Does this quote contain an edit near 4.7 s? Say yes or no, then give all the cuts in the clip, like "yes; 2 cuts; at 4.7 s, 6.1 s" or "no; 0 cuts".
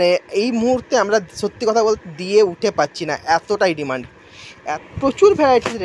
yes; 1 cut; at 4.7 s